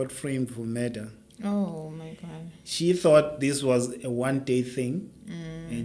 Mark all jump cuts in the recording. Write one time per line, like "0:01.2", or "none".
none

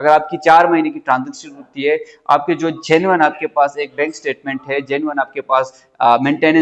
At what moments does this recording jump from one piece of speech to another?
none

